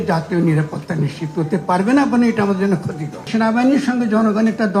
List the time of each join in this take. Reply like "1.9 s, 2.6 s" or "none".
3.2 s